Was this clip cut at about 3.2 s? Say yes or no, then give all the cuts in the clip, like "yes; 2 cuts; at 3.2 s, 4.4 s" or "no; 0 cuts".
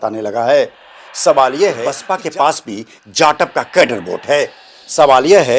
no; 1 cut; at 2.0 s